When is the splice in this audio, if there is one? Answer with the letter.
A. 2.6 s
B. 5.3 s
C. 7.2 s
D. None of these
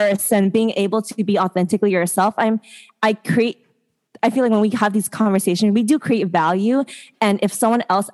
D